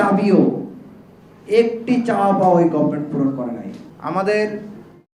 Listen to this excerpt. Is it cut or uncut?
cut